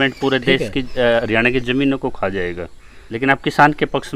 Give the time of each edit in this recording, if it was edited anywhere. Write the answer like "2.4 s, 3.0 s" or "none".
3.0 s

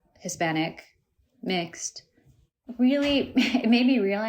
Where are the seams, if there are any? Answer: 2.5 s

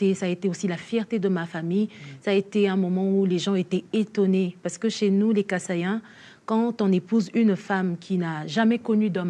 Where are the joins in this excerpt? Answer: none

